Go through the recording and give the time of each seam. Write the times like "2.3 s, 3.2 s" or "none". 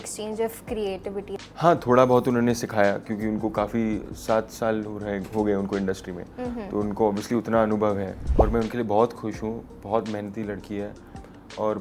1.4 s, 8.2 s